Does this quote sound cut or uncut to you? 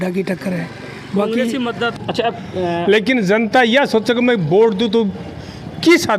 cut